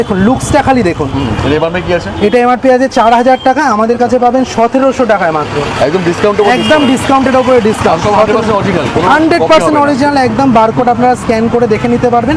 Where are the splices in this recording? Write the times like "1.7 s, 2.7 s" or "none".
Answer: none